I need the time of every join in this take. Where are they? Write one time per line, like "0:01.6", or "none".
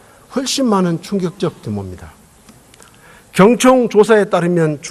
none